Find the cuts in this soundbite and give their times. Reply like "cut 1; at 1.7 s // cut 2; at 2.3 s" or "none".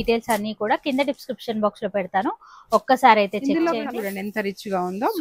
cut 1; at 3.9 s